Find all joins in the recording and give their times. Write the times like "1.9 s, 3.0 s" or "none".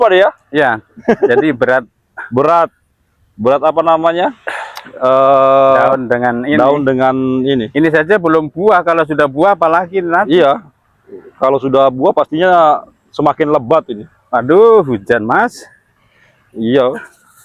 none